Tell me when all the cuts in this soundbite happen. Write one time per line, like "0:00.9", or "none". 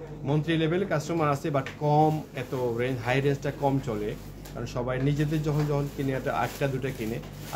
none